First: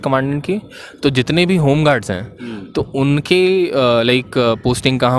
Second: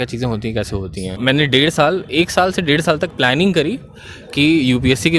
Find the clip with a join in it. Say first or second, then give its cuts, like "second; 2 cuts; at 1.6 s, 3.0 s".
second; 1 cut; at 1.1 s